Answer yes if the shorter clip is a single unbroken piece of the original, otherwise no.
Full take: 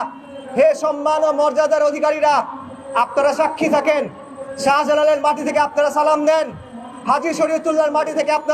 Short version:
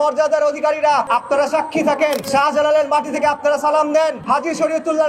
no